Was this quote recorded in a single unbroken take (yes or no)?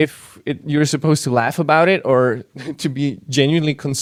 yes